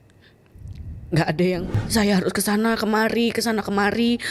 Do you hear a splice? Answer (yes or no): yes